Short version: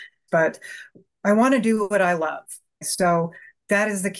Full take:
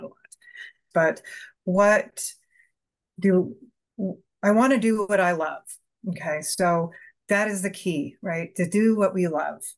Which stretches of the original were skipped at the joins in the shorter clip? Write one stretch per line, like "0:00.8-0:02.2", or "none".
0:01.6-0:04.1
0:06.1-0:06.5